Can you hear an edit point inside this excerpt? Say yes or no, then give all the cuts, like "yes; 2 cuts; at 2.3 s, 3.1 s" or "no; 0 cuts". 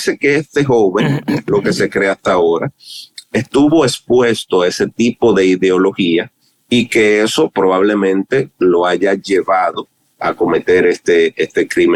no; 0 cuts